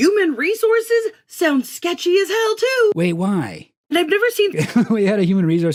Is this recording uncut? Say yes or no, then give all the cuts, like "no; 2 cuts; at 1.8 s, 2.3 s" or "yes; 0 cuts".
yes; 0 cuts